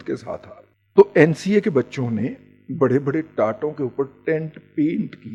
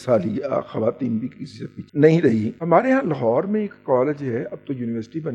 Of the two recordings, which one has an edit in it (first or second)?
second